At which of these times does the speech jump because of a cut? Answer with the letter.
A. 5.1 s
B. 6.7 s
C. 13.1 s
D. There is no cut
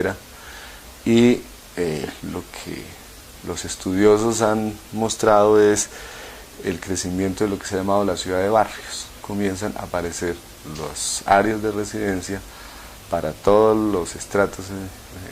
B